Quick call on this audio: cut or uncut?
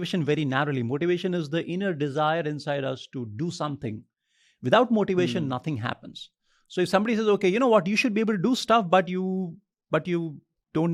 uncut